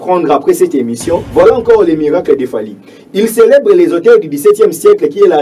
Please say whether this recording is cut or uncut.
cut